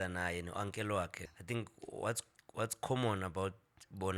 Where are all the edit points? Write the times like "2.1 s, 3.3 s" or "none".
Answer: 1.2 s

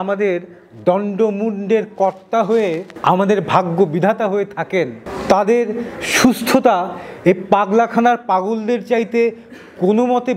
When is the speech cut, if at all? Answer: none

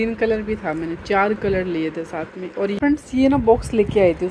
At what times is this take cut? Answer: 2.8 s

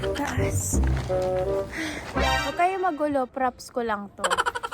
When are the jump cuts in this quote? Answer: 2.4 s

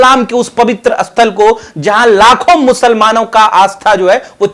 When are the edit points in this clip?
none

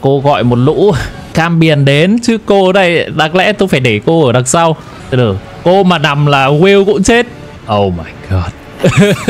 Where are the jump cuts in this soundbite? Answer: 1.3 s, 4.9 s

